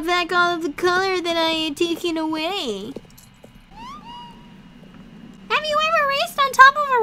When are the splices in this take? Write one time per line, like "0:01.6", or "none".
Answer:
0:03.7
0:05.3